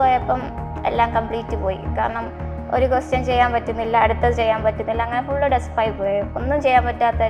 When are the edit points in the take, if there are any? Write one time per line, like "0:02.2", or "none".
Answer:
none